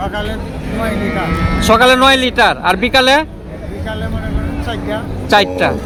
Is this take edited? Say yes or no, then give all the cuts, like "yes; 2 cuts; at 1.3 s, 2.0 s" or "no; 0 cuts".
no; 0 cuts